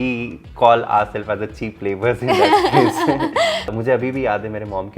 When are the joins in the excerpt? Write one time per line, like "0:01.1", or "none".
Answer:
0:03.7